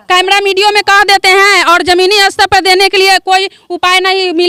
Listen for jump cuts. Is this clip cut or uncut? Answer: uncut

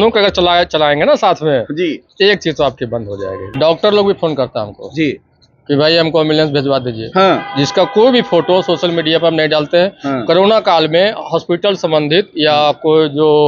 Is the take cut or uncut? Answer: cut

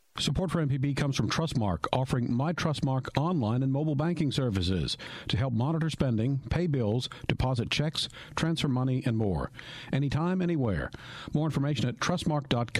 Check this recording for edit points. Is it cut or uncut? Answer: uncut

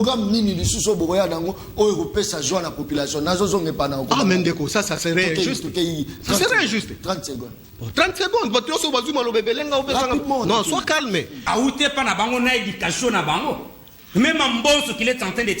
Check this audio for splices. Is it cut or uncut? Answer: cut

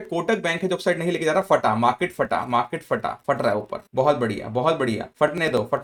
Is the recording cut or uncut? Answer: uncut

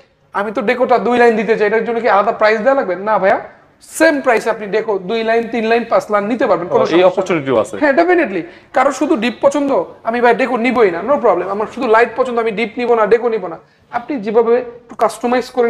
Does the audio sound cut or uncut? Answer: uncut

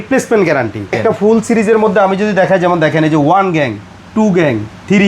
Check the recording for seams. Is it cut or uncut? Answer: cut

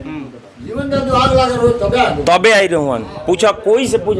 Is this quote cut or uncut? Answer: uncut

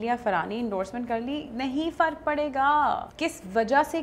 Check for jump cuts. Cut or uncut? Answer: cut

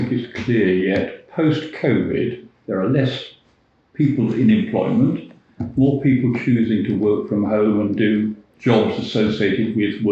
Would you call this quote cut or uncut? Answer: cut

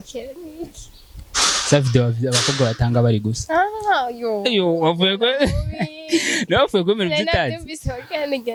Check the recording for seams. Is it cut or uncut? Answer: uncut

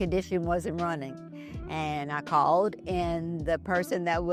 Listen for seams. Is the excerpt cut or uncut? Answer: uncut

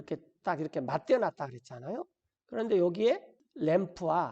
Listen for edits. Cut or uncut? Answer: cut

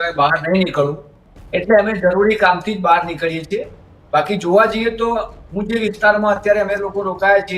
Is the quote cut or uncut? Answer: uncut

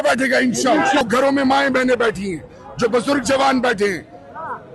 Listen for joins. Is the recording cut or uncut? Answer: cut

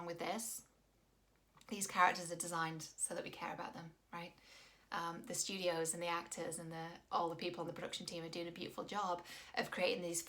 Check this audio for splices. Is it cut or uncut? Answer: uncut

